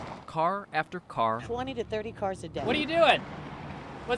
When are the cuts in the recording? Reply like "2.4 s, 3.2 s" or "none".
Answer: 1.4 s, 2.5 s